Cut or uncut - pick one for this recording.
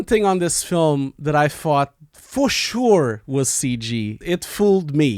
cut